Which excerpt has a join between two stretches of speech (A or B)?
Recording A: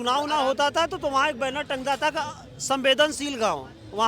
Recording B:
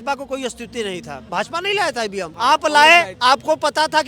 B